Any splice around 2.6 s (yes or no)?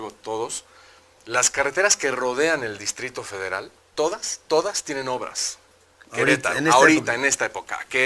no